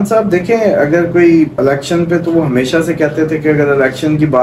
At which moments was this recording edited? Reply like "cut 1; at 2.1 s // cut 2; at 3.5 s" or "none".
cut 1; at 1.6 s